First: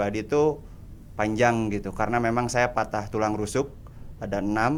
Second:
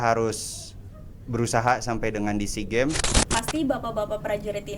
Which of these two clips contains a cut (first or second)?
second